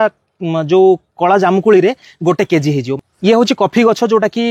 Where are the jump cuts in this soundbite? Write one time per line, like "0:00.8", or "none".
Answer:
0:02.9

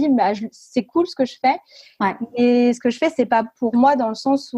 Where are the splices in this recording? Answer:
none

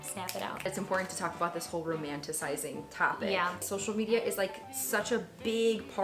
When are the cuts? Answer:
0:00.7
0:03.6

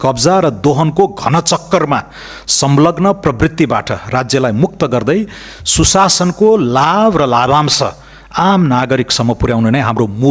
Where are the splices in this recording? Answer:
none

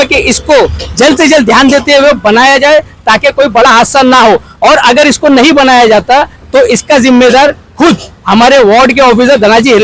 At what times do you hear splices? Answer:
none

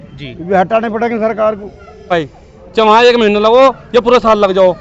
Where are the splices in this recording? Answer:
0:02.1

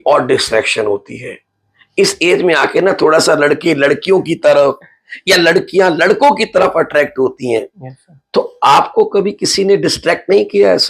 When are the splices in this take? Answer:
none

